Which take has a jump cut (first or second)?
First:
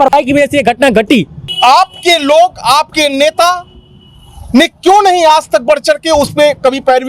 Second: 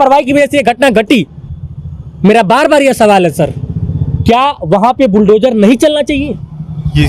first